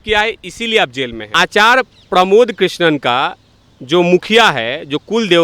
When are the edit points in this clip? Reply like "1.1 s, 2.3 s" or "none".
1.2 s